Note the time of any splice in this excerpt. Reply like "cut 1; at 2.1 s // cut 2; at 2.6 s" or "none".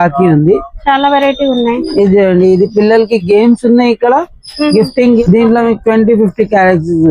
cut 1; at 5.2 s